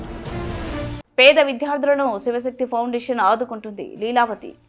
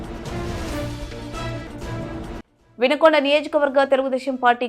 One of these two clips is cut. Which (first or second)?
first